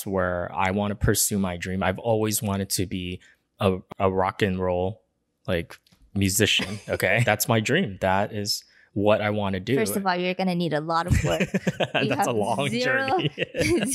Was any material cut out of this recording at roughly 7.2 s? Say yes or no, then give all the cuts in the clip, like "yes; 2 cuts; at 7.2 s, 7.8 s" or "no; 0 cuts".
yes; 2 cuts; at 3.8 s, 7.2 s